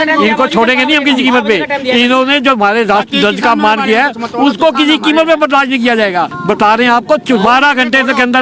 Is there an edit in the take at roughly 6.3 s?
yes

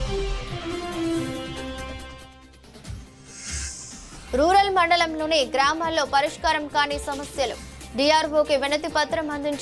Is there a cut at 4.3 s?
yes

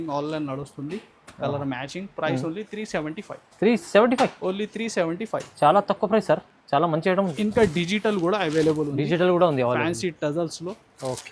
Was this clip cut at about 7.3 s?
yes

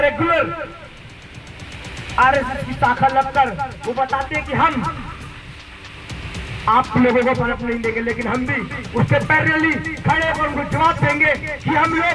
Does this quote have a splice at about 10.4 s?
no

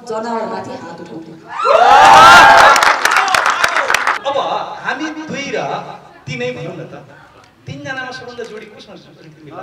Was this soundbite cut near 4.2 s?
yes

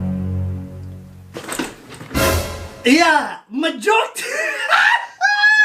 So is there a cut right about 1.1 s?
yes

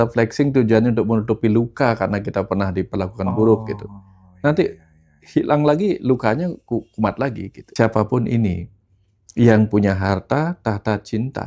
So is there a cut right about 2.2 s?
no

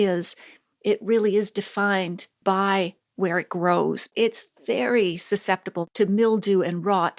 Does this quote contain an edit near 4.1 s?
yes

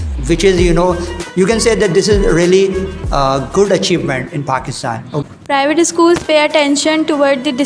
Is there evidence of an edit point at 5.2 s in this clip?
yes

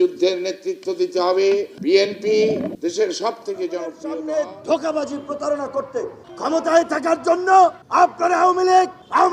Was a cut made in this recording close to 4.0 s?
yes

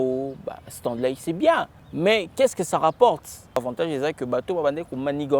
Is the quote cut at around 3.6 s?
yes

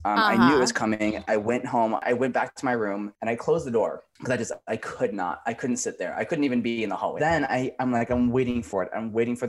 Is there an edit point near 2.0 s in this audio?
yes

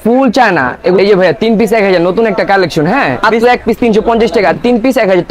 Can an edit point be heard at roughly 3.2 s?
yes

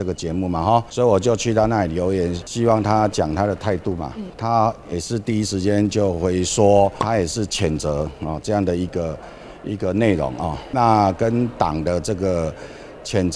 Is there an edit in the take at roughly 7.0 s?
yes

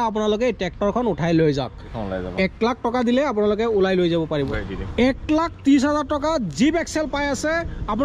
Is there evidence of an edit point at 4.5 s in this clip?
yes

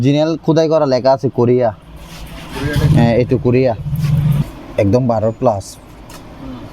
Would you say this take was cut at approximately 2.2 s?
no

